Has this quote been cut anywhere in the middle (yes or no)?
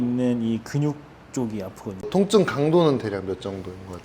yes